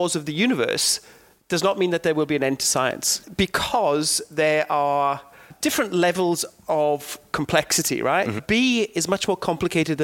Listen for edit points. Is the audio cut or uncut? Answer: cut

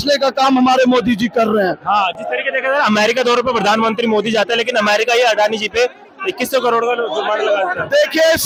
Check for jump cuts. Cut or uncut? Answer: uncut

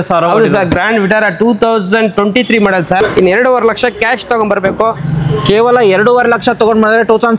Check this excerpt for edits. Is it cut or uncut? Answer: cut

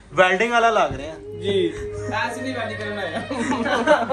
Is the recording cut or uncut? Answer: uncut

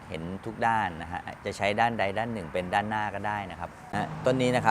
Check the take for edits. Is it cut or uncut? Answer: cut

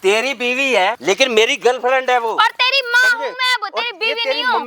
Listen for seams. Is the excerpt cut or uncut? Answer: cut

